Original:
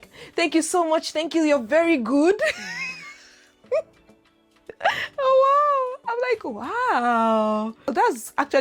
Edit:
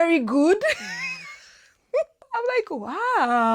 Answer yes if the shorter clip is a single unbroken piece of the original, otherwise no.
no